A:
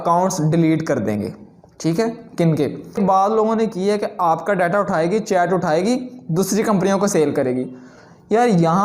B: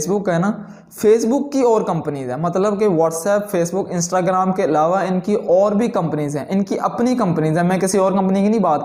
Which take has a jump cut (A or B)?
A